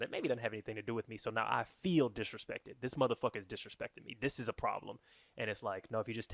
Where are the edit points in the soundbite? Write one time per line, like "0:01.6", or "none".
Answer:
none